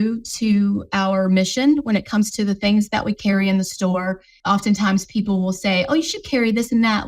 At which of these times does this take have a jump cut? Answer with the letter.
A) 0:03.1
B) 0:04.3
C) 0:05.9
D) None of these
B